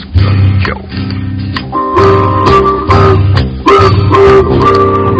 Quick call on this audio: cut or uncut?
uncut